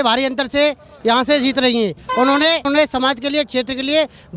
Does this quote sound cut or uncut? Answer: uncut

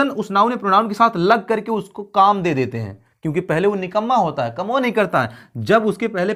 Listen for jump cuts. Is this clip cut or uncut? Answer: uncut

